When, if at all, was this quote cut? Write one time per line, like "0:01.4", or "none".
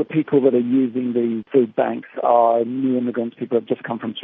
0:01.4